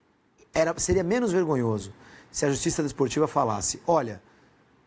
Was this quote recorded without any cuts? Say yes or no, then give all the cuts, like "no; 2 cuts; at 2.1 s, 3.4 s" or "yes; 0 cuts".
yes; 0 cuts